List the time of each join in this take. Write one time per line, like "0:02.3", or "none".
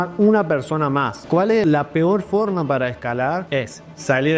0:01.6
0:03.4